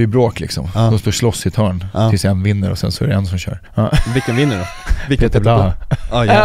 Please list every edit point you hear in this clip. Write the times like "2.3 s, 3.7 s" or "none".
3.7 s